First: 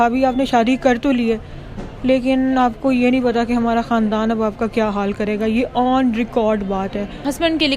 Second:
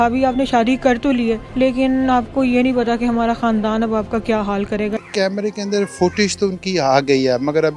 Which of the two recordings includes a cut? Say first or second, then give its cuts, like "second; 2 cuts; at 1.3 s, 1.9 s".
second; 2 cuts; at 1.5 s, 5.0 s